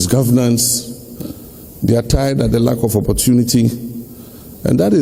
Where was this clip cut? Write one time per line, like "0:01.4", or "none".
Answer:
none

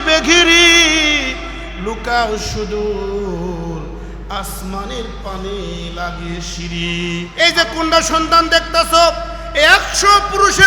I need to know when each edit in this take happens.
0:07.3

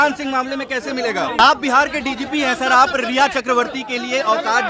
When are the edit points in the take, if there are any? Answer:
0:01.4

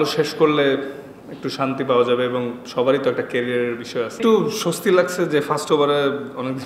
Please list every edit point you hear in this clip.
0:04.2

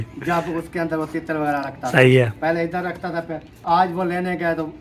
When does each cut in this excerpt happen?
none

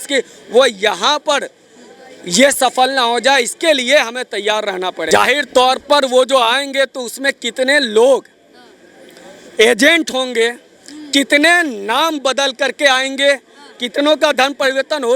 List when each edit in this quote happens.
0:05.0

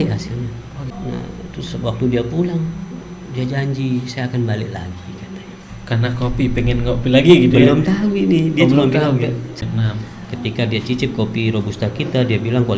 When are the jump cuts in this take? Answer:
0:00.9
0:09.6

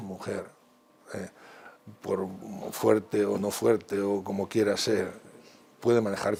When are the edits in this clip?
none

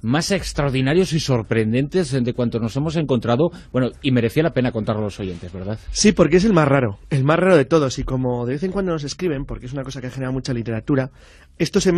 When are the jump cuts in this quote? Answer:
0:03.0

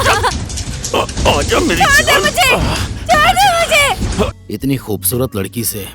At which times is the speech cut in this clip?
0:04.4

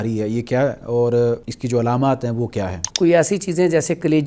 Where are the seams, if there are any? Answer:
0:01.5
0:02.8

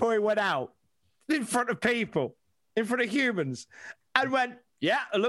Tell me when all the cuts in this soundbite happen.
none

